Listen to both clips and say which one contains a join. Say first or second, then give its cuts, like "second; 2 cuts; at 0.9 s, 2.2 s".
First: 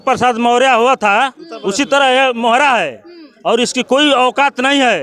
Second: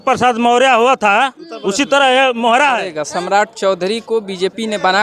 second; 1 cut; at 3.0 s